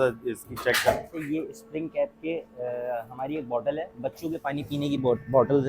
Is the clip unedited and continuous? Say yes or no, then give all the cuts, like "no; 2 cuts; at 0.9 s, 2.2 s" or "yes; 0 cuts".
no; 1 cut; at 1.2 s